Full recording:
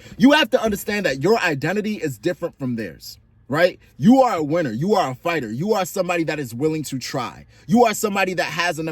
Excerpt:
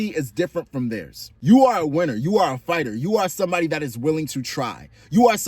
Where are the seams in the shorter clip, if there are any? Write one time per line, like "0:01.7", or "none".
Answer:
0:01.3